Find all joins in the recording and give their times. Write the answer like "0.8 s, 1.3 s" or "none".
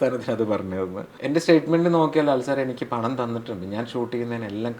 1.1 s